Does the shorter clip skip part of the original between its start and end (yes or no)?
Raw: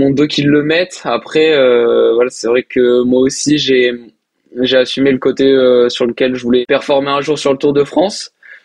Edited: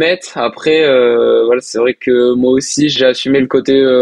yes